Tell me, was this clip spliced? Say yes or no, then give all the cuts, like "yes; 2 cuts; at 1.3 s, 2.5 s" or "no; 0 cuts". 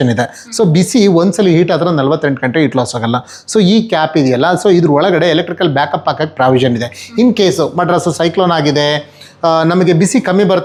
no; 0 cuts